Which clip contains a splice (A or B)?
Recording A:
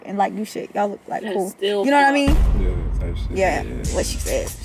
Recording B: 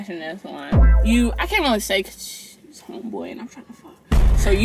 B